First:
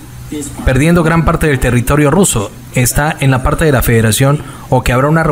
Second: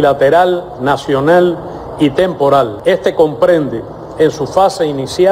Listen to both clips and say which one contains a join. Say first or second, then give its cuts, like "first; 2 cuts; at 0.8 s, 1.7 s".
second; 1 cut; at 2.8 s